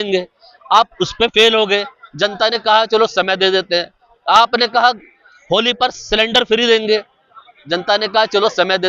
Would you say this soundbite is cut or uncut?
uncut